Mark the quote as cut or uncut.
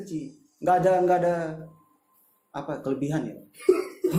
uncut